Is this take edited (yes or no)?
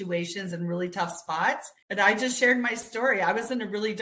yes